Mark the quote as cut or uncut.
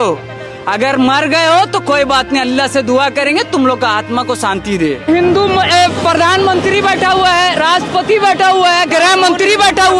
cut